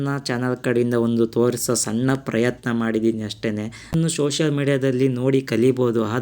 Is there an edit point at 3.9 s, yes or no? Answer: yes